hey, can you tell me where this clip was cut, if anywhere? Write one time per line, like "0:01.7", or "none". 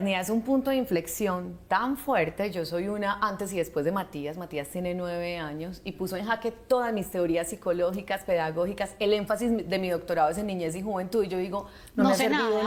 none